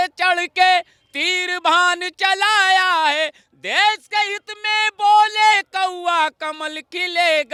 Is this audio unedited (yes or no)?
yes